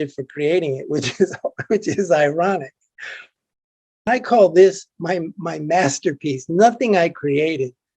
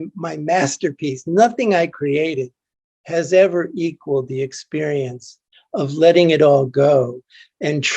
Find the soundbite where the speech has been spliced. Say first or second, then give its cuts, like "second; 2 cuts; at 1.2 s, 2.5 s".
first; 1 cut; at 4.1 s